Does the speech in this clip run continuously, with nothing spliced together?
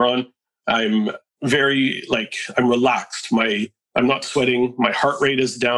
yes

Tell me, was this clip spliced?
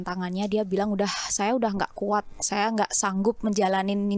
no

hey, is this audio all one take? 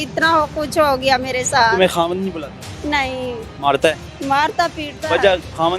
yes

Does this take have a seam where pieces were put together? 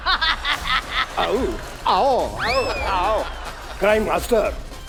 no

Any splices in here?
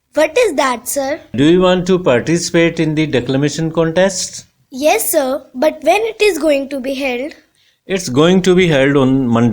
yes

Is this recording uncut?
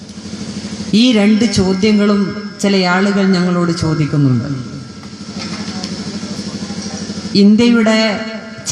yes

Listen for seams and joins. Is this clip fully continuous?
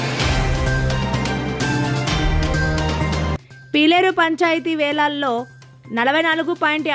no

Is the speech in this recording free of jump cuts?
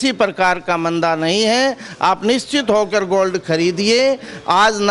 yes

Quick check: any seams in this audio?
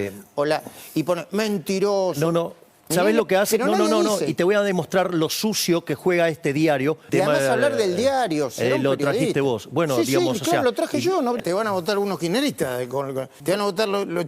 yes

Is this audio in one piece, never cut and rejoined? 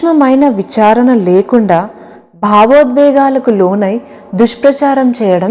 yes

